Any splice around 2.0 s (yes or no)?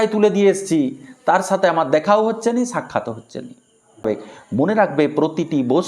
no